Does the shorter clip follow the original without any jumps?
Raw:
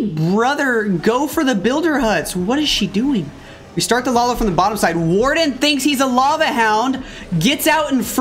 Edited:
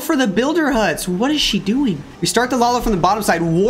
no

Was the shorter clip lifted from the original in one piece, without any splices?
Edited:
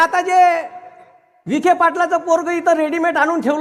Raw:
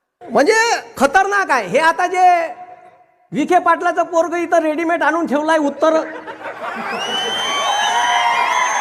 yes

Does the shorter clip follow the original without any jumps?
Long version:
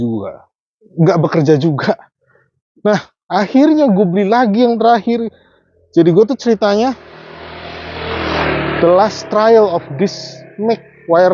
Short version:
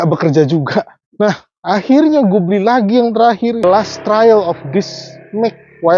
no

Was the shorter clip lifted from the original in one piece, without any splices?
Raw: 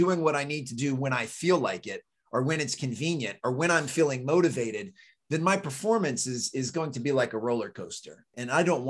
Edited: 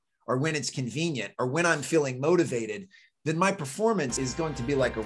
no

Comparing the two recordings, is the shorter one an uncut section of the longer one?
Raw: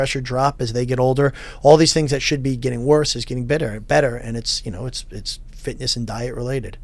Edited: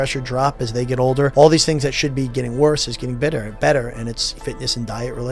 no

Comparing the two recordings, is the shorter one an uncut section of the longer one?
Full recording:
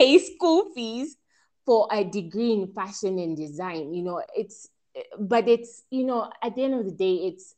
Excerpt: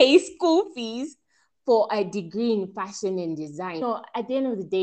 no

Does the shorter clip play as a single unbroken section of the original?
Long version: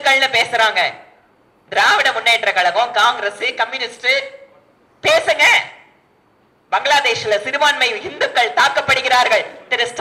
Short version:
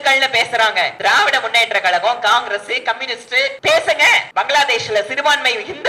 no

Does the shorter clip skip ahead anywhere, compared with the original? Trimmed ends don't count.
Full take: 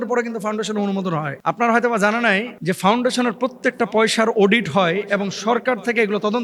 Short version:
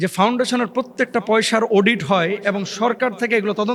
no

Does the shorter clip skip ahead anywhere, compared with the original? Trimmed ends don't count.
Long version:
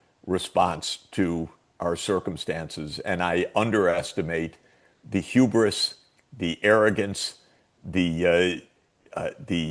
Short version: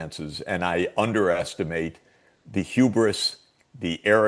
no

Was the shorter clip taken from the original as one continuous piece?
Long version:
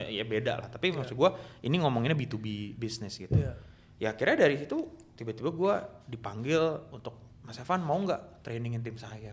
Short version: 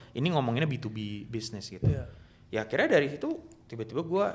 yes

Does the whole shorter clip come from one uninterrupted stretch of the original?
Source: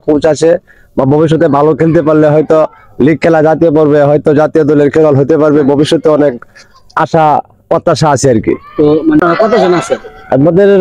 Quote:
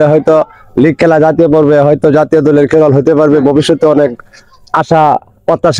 yes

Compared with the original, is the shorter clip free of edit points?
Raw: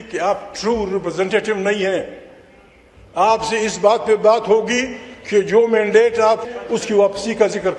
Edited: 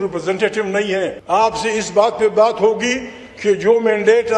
no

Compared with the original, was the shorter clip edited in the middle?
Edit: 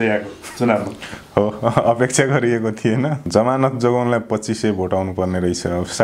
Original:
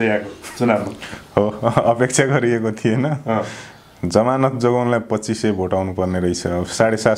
yes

